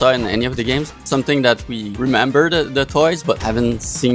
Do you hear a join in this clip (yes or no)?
yes